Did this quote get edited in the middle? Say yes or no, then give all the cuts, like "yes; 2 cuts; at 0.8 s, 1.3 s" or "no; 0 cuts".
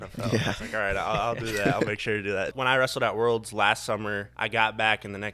yes; 2 cuts; at 2.5 s, 4.3 s